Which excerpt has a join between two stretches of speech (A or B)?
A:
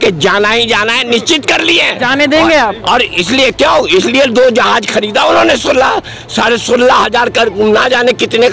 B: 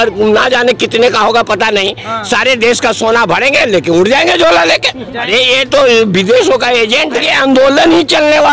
B